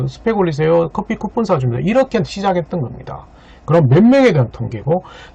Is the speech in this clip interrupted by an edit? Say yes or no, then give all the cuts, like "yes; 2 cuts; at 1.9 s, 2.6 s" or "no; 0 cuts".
no; 0 cuts